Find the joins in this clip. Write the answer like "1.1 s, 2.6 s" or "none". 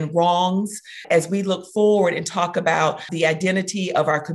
1.0 s, 3.1 s